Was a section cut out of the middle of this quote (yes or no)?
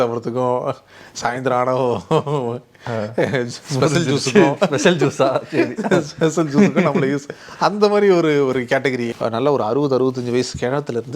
yes